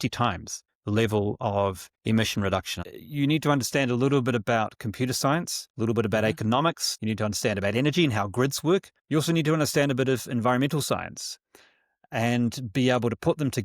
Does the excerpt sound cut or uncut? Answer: cut